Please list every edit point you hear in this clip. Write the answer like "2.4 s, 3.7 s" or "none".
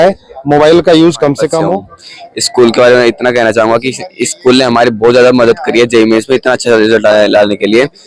1.8 s